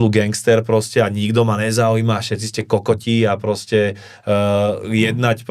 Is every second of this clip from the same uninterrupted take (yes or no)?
yes